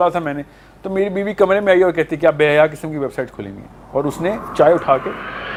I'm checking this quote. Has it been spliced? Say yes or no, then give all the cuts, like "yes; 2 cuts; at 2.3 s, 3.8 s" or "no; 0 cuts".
no; 0 cuts